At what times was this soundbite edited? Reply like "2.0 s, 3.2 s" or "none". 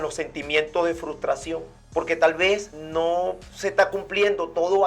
1.7 s, 2.8 s

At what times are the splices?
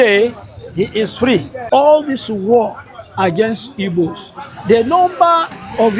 1.5 s

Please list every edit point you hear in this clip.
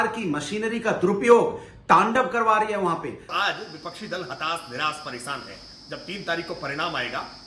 3.2 s

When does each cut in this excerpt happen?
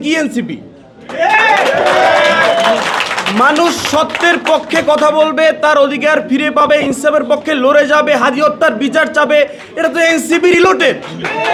none

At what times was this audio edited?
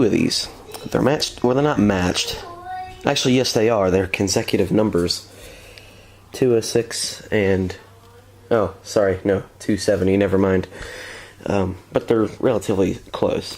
6.4 s

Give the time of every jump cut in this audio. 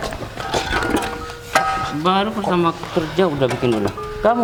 none

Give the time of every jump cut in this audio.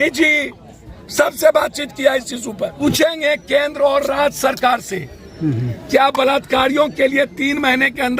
2.7 s

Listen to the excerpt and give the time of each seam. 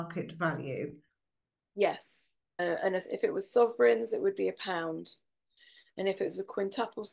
2.6 s

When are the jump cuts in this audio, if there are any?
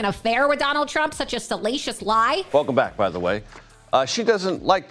2.5 s

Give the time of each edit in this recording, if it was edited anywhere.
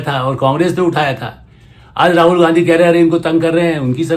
none

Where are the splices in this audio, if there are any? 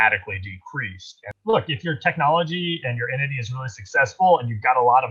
1.3 s

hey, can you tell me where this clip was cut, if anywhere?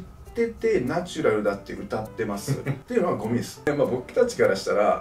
2.7 s, 3.7 s

